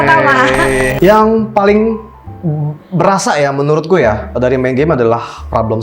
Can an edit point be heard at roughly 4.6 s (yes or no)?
no